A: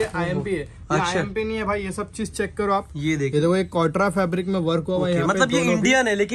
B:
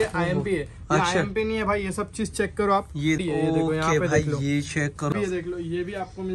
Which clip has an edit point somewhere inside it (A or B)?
B